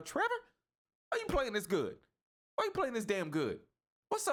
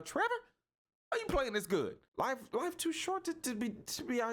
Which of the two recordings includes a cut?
second; 1 cut; at 2.0 s

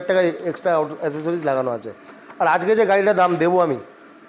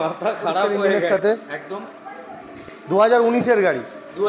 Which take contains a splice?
second; 2 cuts; at 1.0 s, 2.5 s

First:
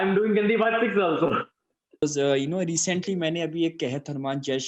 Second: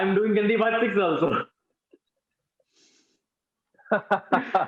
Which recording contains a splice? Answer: first; 1 cut; at 2.0 s

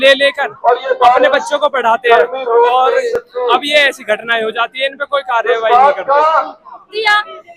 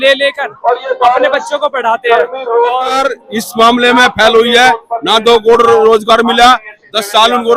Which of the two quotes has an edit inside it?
second; 1 cut; at 3.0 s

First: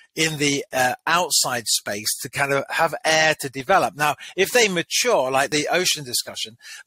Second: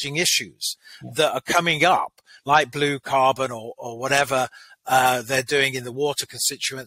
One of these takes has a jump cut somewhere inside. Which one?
first; 1 cut; at 5.5 s

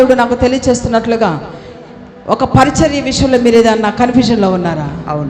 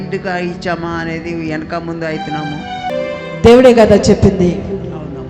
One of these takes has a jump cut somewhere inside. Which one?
second; 1 cut; at 2.9 s

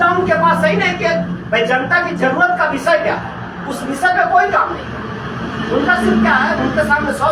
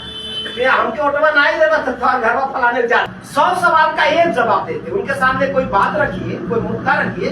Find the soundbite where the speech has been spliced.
second; 1 cut; at 3.2 s

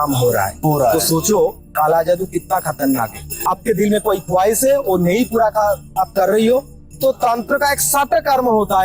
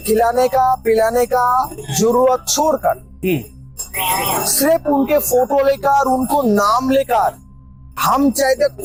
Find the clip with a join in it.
first; 1 cut; at 3.4 s

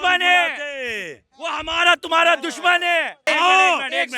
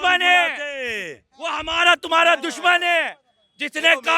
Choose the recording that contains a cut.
first; 1 cut; at 3.2 s

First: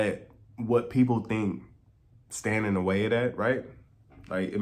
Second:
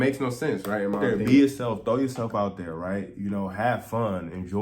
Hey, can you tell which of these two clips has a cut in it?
second; 1 cut; at 1.0 s

